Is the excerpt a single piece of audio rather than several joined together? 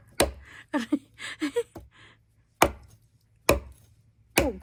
yes; 0 cuts

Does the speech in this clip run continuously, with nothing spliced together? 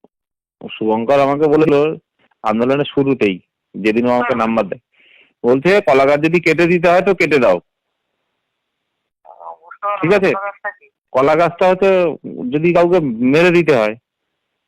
no; 1 cut; at 1.7 s

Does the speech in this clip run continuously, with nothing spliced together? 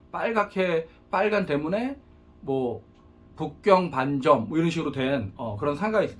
yes; 0 cuts

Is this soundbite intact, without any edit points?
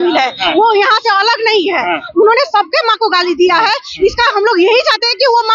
yes; 0 cuts

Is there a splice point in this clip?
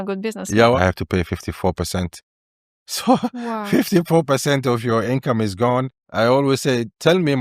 yes; 2 cuts; at 0.8 s, 6.0 s

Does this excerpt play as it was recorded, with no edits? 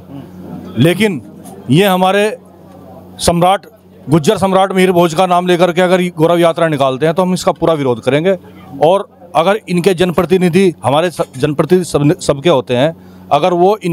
yes; 0 cuts

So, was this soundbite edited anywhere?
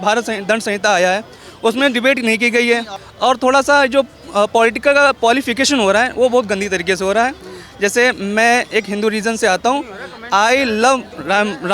yes; 1 cut; at 3.0 s

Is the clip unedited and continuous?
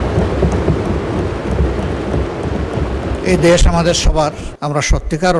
no; 1 cut; at 4.5 s

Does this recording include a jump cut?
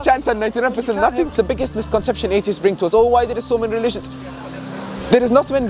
yes; 1 cut; at 1.3 s

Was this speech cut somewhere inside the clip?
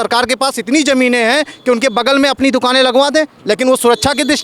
no; 0 cuts

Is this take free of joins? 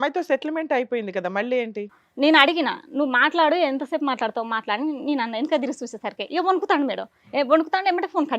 no; 1 cut; at 2.0 s

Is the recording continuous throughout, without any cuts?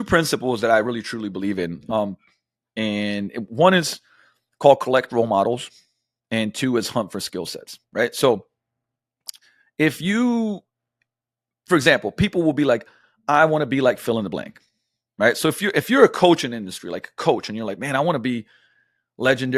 yes; 0 cuts

